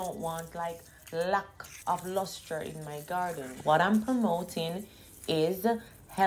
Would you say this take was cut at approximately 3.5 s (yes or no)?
yes